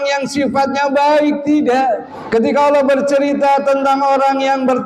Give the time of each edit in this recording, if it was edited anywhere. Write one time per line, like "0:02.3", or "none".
0:02.1